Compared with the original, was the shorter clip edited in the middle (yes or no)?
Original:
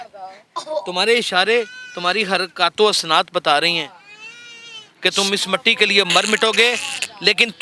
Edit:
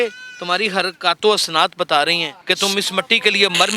yes